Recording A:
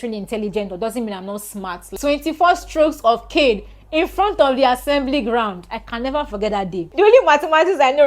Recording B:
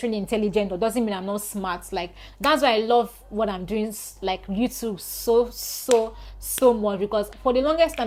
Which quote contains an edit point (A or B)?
A